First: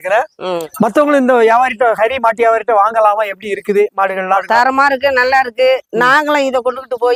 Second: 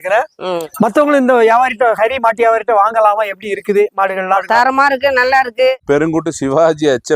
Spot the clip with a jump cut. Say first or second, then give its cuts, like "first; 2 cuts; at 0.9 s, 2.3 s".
second; 1 cut; at 5.8 s